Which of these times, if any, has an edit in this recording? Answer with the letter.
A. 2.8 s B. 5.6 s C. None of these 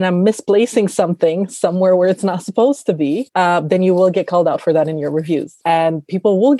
B